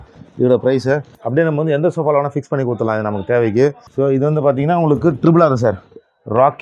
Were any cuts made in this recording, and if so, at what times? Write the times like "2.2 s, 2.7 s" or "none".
1.2 s, 3.8 s